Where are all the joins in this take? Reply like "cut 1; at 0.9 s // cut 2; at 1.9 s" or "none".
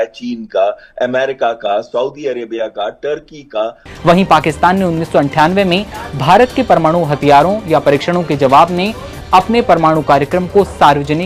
cut 1; at 3.8 s